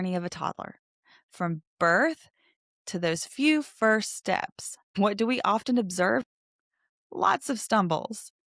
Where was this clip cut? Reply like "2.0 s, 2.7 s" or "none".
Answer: 4.9 s, 6.2 s